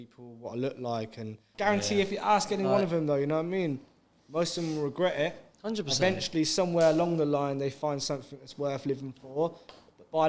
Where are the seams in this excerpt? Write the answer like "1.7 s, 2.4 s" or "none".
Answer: 1.4 s